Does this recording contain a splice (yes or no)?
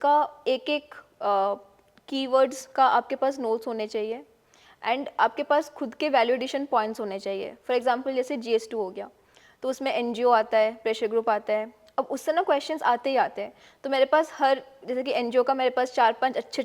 no